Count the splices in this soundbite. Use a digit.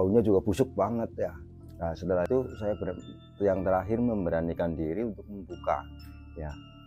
1